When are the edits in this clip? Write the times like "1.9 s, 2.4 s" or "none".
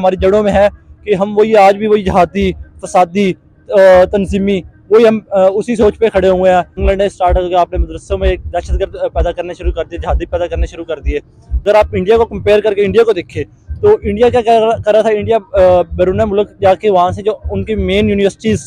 6.8 s, 11.6 s